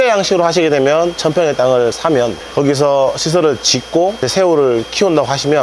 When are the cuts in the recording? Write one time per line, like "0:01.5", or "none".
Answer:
none